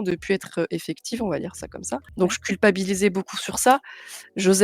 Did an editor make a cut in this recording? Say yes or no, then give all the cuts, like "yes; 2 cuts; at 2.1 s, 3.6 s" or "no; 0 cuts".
yes; 1 cut; at 2.1 s